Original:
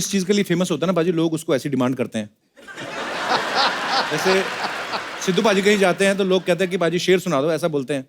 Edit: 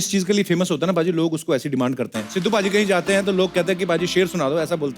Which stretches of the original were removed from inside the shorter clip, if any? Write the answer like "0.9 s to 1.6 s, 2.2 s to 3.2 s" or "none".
2.2 s to 5.1 s